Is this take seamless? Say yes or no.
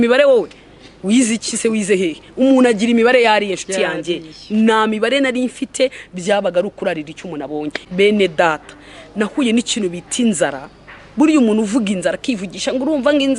no